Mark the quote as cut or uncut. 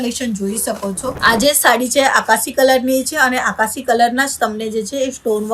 cut